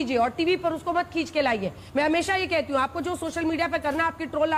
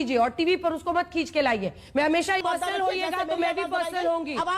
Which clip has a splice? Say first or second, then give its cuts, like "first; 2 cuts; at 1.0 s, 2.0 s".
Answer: second; 1 cut; at 2.4 s